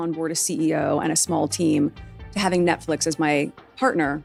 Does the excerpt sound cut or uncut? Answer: uncut